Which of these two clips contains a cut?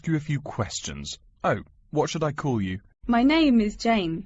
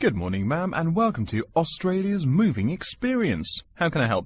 first; 1 cut; at 2.9 s

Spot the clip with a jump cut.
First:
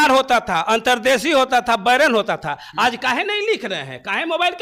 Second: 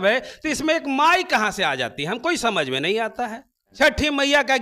second; 1 cut; at 3.7 s

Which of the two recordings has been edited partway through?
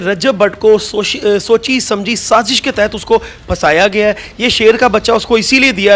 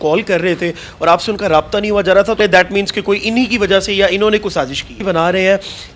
second; 2 cuts; at 2.4 s, 5.0 s

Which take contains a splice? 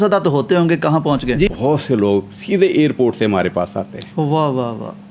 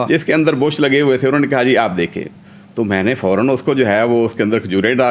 first; 1 cut; at 1.5 s

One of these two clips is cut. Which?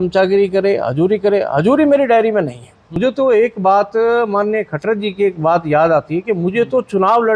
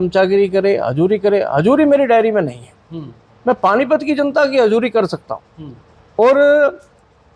first; 1 cut; at 2.8 s

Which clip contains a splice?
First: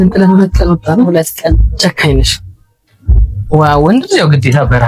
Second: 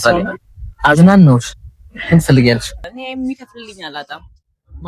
second; 1 cut; at 2.9 s

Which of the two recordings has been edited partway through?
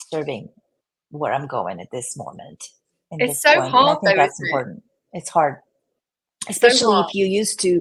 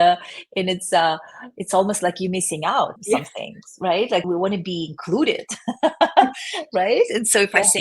second; 2 cuts; at 3.0 s, 4.2 s

